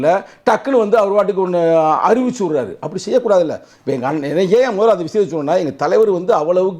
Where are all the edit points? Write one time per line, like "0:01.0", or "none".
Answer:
none